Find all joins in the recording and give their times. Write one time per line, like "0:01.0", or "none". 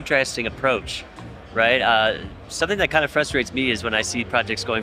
none